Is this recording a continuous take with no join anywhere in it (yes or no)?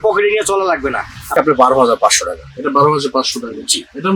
no